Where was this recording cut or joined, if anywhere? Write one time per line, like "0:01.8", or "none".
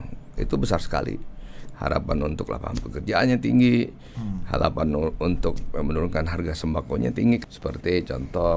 0:07.4